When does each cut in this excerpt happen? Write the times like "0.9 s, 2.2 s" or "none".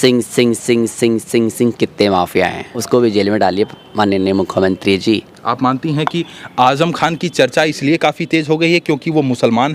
2.7 s, 5.3 s